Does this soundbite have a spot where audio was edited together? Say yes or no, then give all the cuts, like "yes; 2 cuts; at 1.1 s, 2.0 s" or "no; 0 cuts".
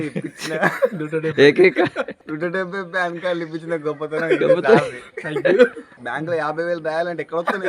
yes; 1 cut; at 2.2 s